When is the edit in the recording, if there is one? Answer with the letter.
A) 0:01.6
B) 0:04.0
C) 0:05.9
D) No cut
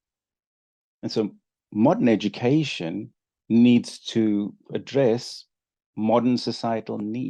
D